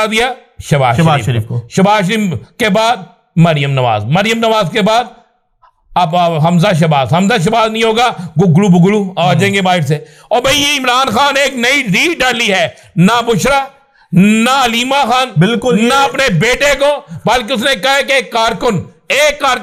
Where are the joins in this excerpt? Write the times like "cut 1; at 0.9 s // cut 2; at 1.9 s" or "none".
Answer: none